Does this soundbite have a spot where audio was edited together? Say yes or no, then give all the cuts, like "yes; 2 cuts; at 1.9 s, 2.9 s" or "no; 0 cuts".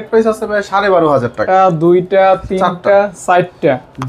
yes; 1 cut; at 1.4 s